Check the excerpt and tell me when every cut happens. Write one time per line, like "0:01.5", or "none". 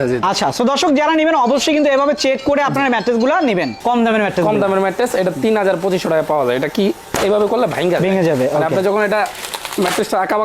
0:03.7